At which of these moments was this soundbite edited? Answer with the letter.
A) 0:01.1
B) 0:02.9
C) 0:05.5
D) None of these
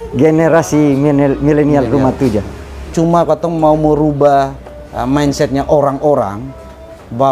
B